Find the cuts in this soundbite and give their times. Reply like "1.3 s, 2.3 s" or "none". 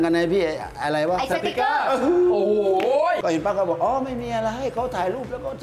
3.2 s